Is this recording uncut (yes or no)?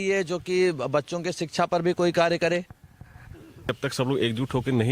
no